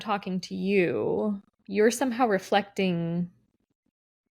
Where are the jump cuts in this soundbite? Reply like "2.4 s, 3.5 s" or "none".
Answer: 1.5 s